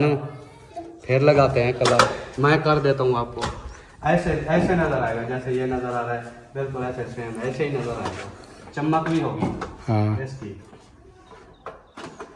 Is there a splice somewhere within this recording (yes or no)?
no